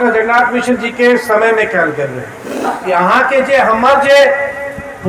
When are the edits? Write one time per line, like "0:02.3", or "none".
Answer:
0:02.7